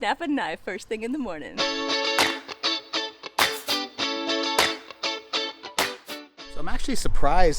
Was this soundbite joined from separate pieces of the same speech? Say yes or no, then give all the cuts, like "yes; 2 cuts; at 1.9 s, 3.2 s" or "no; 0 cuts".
yes; 2 cuts; at 1.5 s, 6.1 s